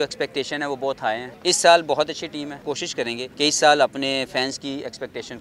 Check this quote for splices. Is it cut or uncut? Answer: cut